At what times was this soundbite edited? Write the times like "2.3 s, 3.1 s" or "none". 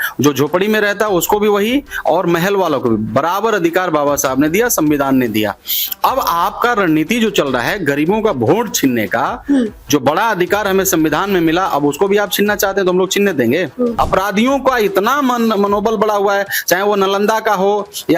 13.9 s